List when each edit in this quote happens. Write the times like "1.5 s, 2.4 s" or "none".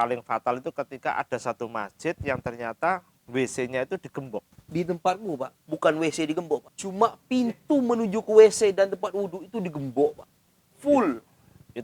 4.6 s, 5.6 s, 6.8 s